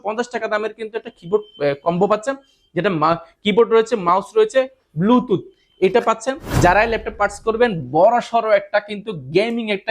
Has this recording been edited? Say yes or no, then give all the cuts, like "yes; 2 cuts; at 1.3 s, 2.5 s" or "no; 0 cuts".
yes; 1 cut; at 6.5 s